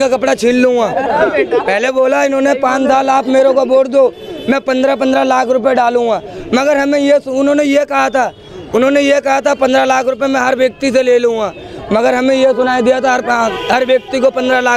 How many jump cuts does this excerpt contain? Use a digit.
0